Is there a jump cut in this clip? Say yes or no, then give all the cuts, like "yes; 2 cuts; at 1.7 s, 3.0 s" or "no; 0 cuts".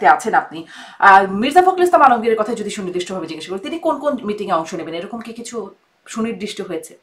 no; 0 cuts